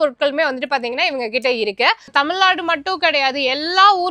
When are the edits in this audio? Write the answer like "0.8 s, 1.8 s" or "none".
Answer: 2.0 s